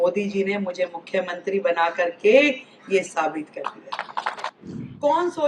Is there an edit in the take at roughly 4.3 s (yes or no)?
yes